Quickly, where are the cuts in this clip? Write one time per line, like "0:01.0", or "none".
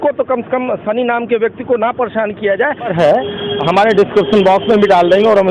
0:02.9